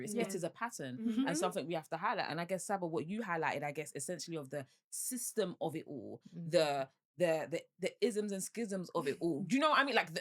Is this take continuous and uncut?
yes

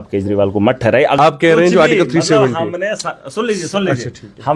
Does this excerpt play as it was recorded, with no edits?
no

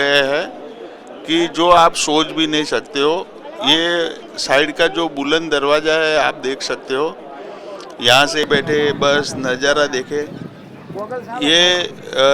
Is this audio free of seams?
no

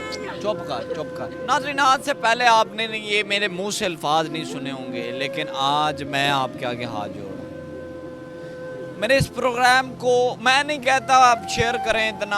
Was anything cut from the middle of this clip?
yes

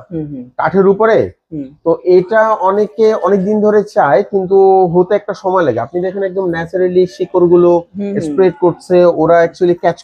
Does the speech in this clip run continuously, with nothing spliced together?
yes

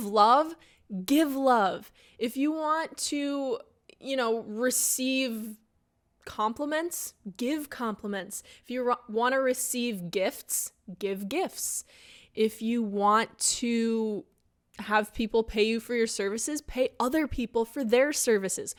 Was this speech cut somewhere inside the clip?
no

